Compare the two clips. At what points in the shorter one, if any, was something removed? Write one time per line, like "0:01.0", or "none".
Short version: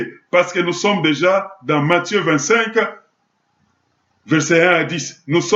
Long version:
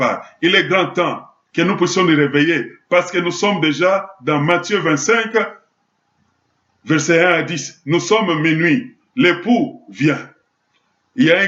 none